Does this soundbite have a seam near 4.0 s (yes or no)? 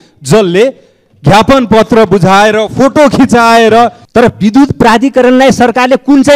yes